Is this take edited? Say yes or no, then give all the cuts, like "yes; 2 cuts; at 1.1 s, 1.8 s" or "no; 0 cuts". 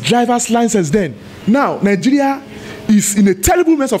yes; 1 cut; at 1.3 s